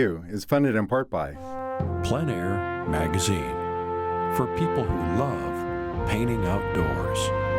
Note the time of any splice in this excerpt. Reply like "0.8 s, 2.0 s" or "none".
1.4 s

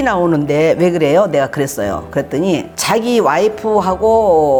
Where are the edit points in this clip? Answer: none

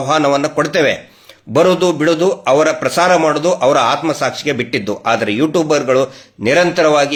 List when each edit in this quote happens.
none

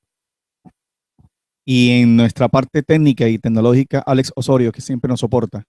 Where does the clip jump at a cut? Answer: 3.0 s

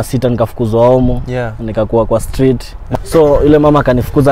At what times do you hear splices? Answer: 2.8 s

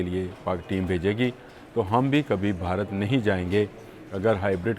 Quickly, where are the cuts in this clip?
none

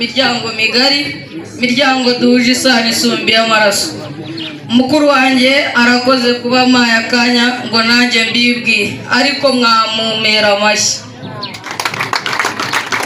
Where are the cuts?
none

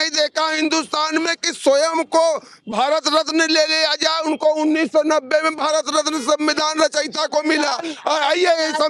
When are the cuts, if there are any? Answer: none

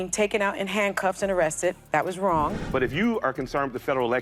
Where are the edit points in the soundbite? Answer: 2.6 s

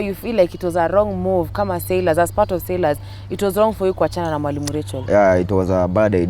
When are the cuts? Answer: none

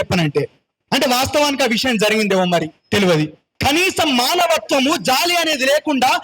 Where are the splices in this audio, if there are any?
3.5 s

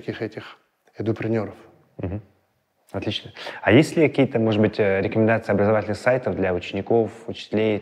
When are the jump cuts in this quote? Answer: none

